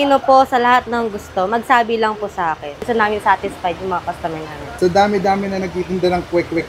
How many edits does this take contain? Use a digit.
2